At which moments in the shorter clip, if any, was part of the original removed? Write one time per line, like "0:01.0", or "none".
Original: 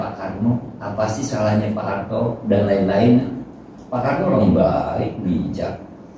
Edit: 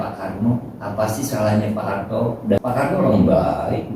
0:02.6